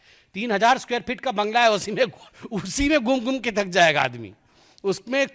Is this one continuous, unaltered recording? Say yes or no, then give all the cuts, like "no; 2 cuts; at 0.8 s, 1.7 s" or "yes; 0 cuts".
yes; 0 cuts